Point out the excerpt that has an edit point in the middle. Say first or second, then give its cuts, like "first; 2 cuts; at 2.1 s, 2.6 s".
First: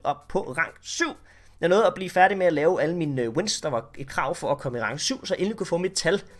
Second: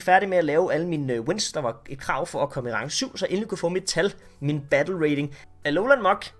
second; 1 cut; at 5.4 s